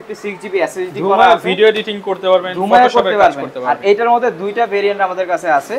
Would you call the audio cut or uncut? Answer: uncut